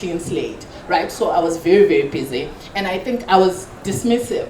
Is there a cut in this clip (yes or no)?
no